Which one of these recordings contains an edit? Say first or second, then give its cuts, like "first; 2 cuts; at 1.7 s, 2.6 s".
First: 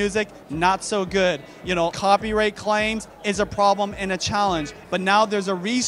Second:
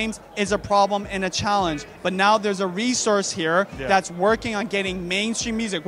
first; 1 cut; at 1.9 s